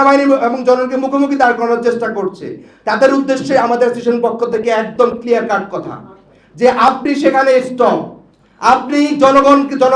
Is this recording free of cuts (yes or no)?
yes